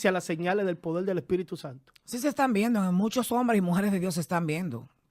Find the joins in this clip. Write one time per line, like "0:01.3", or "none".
none